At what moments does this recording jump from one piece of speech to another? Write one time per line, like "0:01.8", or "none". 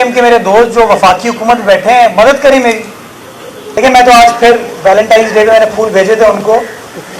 0:03.6